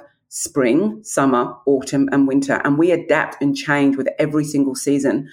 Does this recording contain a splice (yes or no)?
no